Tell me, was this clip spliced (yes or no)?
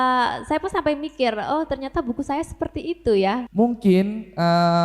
yes